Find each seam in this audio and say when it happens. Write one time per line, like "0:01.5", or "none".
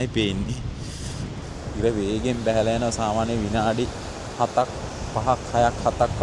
0:01.4